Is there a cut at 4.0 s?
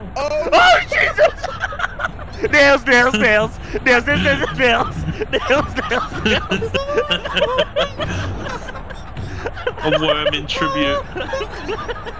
no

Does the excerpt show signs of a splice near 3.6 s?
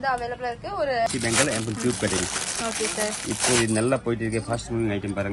no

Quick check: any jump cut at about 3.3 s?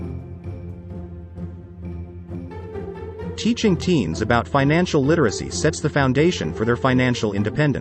yes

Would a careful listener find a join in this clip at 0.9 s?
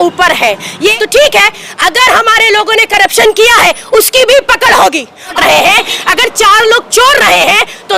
yes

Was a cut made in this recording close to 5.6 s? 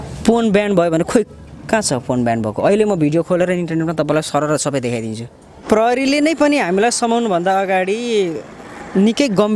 yes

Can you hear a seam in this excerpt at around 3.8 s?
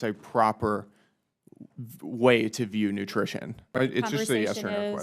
yes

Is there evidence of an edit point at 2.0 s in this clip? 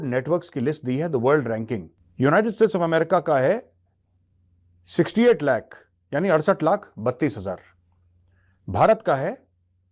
yes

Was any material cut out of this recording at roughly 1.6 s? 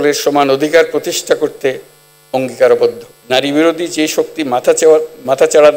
no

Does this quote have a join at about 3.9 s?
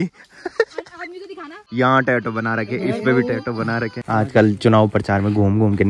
yes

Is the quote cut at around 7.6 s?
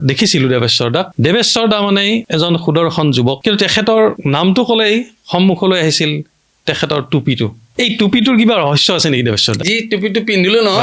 yes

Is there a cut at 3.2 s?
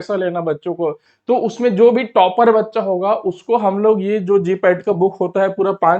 no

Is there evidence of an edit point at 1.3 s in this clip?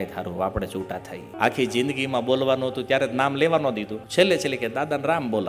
yes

